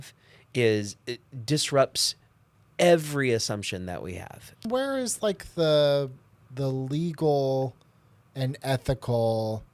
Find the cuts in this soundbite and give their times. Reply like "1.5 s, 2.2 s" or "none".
4.7 s